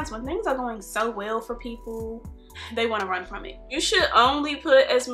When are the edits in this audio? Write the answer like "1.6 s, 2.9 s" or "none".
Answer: 3.6 s